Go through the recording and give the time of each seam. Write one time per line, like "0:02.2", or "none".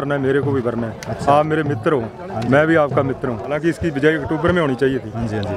0:03.6